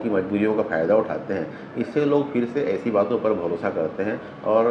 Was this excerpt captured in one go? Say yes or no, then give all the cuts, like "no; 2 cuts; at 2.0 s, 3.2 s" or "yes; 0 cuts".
yes; 0 cuts